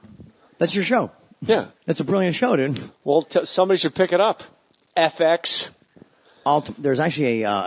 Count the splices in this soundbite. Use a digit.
0